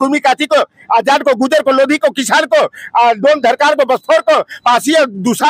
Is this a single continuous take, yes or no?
yes